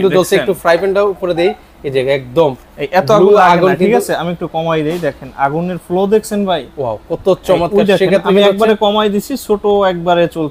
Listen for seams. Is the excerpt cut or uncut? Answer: uncut